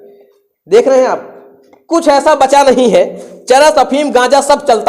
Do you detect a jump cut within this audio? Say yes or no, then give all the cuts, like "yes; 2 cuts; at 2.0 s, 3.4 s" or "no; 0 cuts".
no; 0 cuts